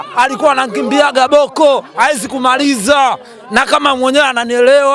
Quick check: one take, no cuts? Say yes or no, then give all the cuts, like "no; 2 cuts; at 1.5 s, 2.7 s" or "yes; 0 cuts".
yes; 0 cuts